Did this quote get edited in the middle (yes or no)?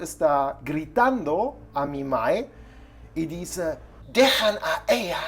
yes